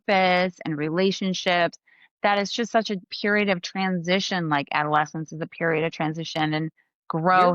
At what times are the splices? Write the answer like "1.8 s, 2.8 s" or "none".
3.1 s

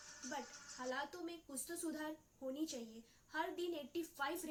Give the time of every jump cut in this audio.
none

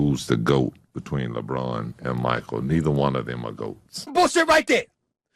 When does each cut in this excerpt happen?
4.1 s

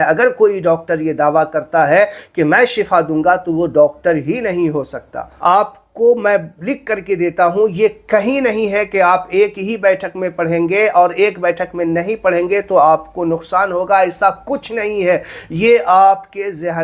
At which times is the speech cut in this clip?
5.3 s

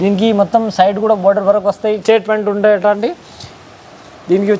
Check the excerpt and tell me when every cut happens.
2.0 s

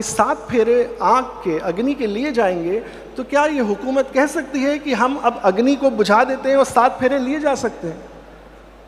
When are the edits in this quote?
none

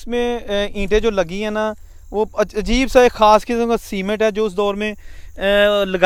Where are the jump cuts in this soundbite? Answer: none

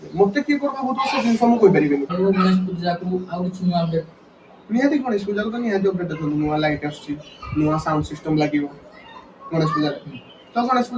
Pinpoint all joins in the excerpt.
2.1 s

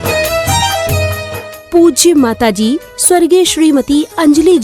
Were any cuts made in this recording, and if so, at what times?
1.3 s

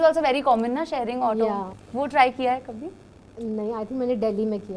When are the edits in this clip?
1.8 s

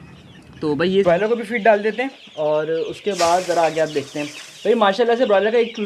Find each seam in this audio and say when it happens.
1.0 s

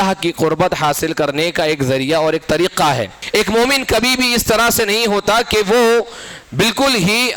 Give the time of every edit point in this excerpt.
3.2 s

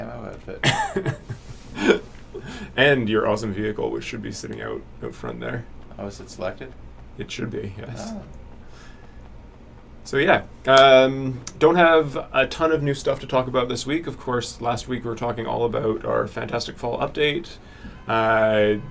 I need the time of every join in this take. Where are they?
none

